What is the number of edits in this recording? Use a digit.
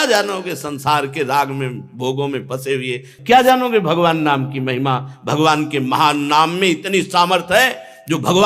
0